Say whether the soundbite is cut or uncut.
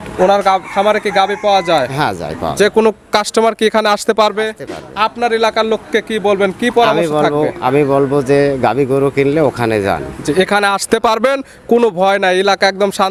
uncut